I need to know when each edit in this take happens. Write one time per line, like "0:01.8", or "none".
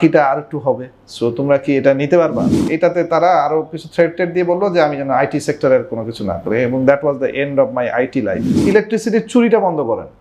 0:02.5
0:08.5